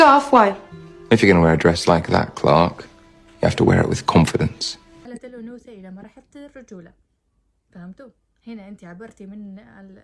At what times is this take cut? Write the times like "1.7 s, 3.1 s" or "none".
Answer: 5.0 s